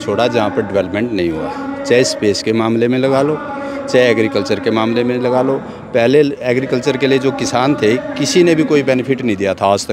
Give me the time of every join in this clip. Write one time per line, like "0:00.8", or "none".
none